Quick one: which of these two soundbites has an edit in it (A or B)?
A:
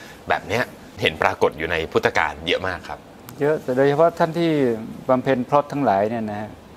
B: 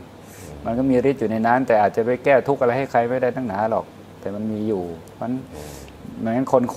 A